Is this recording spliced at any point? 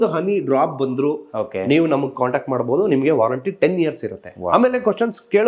no; 0 cuts

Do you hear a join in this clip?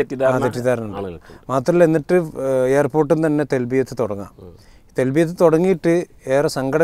no; 0 cuts

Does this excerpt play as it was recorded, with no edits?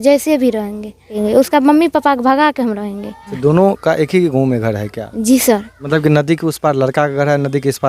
no; 3 cuts; at 1.1 s, 3.3 s, 5.7 s

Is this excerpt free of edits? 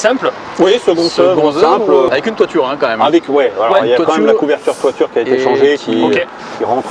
no; 1 cut; at 2.1 s

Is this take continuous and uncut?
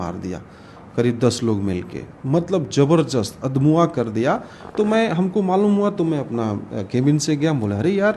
yes; 0 cuts

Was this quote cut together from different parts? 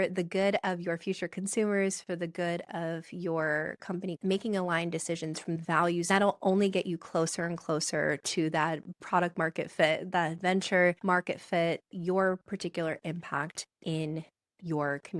yes; 2 cuts; at 5.7 s, 11.0 s

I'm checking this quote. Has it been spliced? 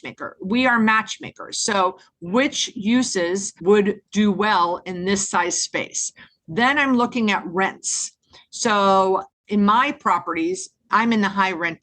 yes; 1 cut; at 3.8 s

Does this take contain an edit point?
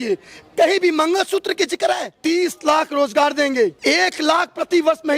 yes; 2 cuts; at 2.2 s, 3.8 s

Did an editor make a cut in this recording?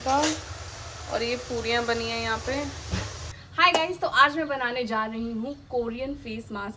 yes; 1 cut; at 3.5 s

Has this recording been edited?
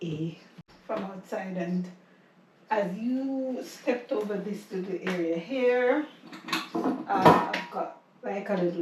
yes; 1 cut; at 0.9 s

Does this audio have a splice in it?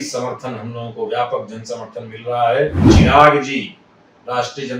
yes; 1 cut; at 2.8 s

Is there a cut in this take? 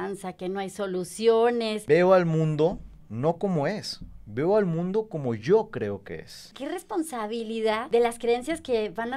yes; 3 cuts; at 1.8 s, 6.5 s, 7.8 s

